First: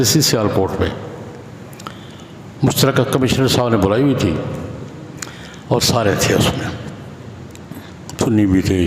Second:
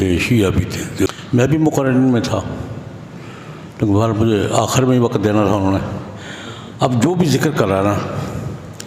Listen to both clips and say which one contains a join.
second; 1 cut; at 1.1 s

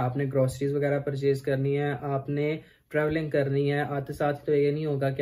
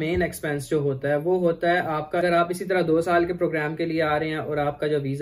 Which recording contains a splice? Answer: second; 1 cut; at 2.2 s

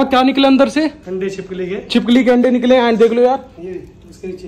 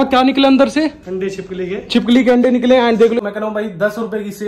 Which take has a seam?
second; 1 cut; at 3.2 s

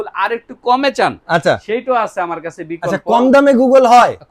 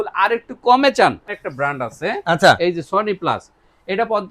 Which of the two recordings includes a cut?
second; 1 cut; at 1.2 s

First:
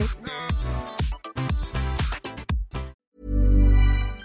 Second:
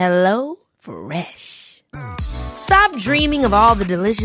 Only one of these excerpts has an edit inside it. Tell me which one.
first; 1 cut; at 3.1 s

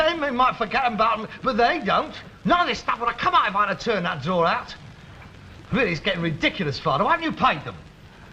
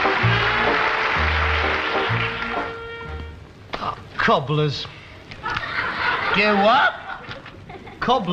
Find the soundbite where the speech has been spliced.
second; 1 cut; at 1.3 s

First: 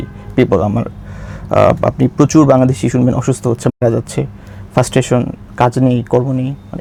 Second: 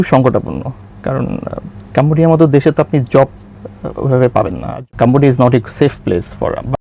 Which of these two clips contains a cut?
second; 1 cut; at 4.8 s

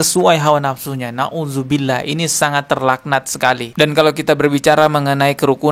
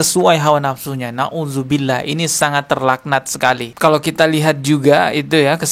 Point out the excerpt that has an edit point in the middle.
second; 1 cut; at 3.7 s

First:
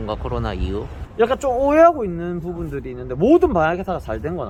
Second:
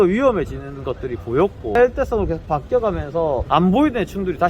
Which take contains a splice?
second; 2 cuts; at 1.8 s, 3.4 s

